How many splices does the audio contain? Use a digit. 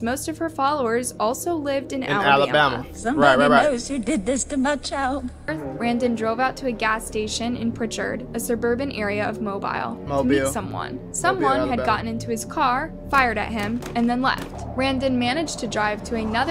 1